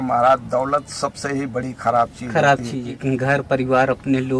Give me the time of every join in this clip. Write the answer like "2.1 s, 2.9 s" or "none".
2.9 s